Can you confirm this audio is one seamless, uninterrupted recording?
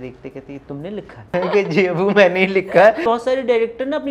no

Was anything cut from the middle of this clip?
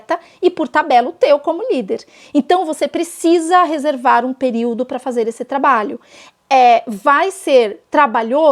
no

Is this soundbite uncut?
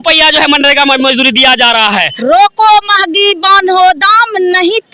no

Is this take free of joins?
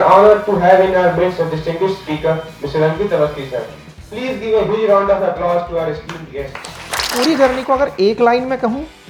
no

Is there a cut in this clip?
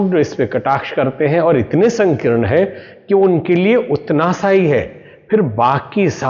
no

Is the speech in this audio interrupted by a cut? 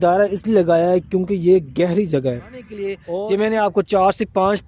yes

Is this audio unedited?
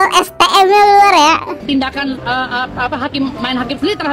no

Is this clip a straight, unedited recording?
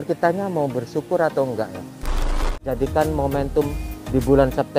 no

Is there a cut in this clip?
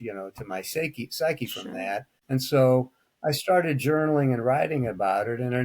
yes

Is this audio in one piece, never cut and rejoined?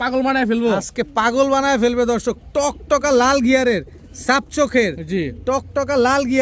yes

